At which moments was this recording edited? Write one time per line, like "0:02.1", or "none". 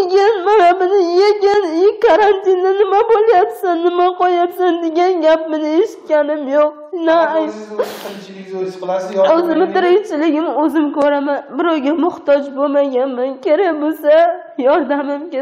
none